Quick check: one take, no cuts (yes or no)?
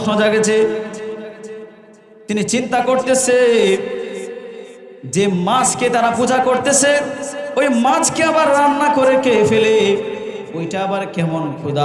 yes